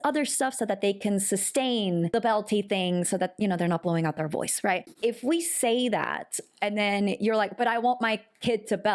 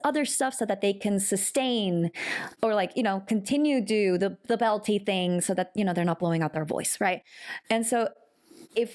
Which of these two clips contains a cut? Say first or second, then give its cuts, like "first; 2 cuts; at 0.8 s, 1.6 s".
first; 2 cuts; at 2.1 s, 4.9 s